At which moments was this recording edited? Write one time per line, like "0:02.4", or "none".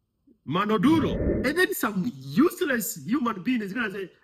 0:01.3